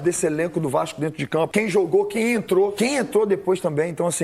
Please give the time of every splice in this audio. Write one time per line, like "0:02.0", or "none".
0:01.5
0:02.7